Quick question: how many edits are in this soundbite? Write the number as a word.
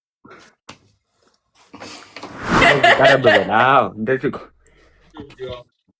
one